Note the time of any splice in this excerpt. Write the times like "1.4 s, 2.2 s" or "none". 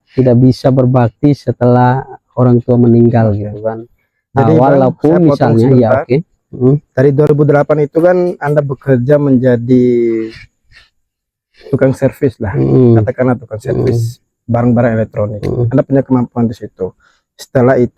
none